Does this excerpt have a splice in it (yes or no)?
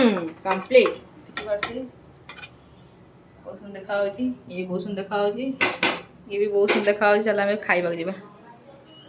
no